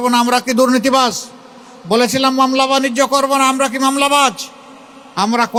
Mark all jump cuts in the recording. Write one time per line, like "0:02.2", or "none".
none